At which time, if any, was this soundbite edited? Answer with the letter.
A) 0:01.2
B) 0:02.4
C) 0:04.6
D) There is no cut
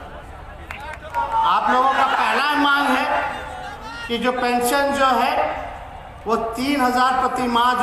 A